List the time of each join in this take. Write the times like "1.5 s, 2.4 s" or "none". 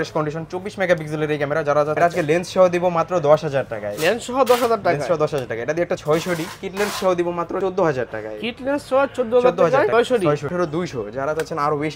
2.0 s, 6.0 s, 7.6 s, 10.2 s